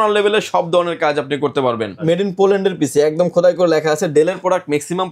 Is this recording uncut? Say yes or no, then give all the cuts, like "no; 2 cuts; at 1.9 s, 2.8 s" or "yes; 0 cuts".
no; 1 cut; at 2.0 s